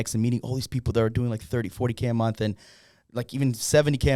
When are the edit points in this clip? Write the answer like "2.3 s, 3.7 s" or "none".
none